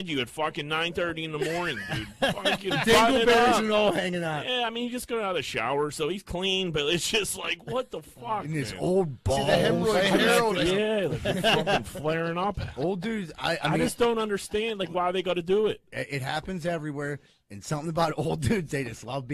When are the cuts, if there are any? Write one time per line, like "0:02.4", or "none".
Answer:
0:10.6